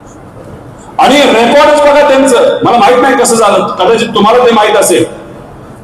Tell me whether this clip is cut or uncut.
uncut